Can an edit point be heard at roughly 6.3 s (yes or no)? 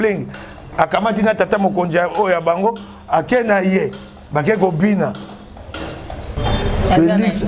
yes